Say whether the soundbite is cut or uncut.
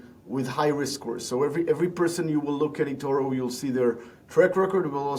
uncut